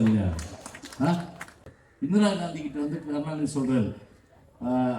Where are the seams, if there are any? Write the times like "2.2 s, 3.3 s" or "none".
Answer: 1.7 s